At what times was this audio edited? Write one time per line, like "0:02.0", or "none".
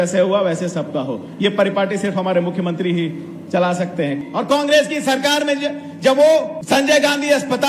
0:04.1
0:06.5